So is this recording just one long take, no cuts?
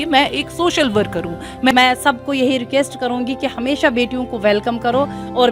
no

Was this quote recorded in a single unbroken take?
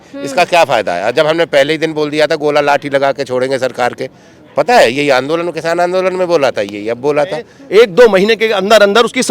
no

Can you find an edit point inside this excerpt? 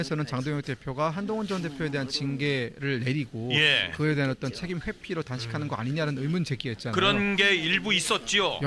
no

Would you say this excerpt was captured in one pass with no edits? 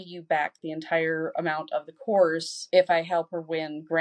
yes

